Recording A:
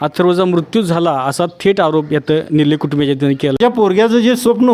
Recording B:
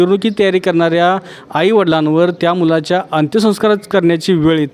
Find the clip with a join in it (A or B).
A